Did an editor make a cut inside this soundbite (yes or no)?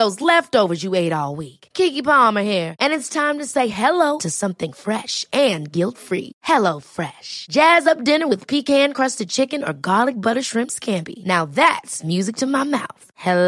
no